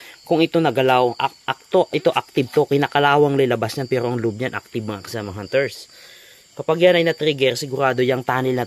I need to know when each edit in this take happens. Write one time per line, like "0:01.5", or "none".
none